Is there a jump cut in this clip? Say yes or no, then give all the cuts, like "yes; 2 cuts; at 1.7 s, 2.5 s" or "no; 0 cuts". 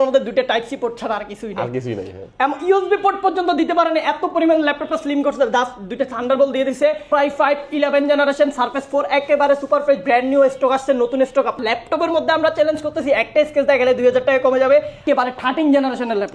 yes; 3 cuts; at 7.0 s, 11.6 s, 15.0 s